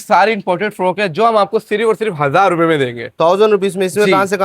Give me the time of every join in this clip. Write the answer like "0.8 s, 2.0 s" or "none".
none